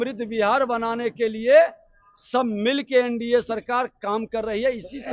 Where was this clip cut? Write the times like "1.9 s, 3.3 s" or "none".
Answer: none